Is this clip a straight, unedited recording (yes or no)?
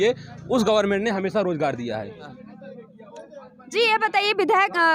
no